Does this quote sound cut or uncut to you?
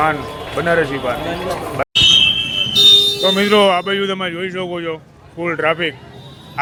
uncut